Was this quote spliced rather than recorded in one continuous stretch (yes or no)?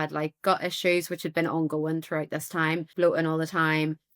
yes